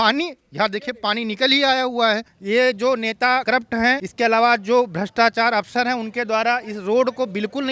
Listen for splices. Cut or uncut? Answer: cut